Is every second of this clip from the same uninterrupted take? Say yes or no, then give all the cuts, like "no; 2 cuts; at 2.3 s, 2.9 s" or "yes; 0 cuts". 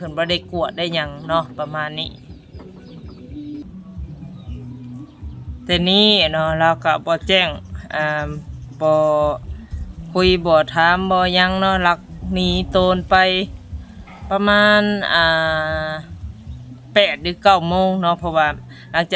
yes; 0 cuts